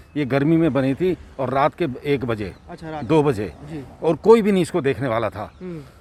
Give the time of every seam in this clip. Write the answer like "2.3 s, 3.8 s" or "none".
none